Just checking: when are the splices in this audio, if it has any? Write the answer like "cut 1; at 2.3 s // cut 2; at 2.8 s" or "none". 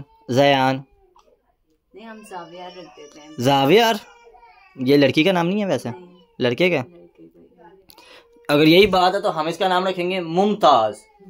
none